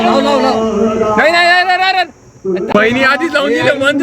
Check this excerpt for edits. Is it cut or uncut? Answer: cut